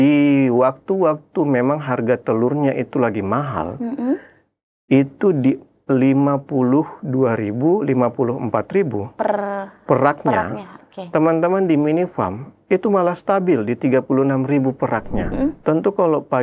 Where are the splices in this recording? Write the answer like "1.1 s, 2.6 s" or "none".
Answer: 15.3 s

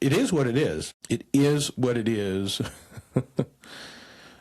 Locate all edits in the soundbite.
0.9 s

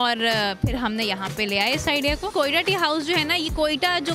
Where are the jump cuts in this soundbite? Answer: 2.3 s

